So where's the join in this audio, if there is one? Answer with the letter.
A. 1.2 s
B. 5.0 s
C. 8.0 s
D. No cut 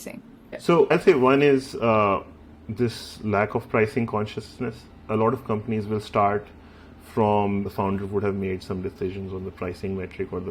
D